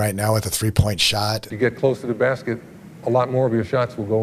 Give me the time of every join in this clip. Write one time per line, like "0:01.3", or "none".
0:01.5